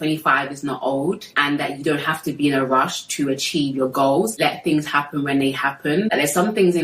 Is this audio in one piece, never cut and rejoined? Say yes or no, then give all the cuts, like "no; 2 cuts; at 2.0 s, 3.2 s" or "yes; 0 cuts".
no; 2 cuts; at 4.3 s, 6.1 s